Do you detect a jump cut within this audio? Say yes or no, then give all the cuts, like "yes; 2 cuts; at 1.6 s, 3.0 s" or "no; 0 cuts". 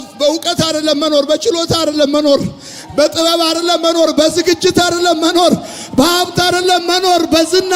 no; 0 cuts